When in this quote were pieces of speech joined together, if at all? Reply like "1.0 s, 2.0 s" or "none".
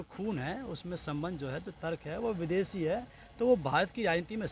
none